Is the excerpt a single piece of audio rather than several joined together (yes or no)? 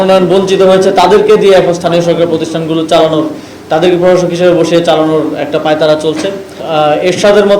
no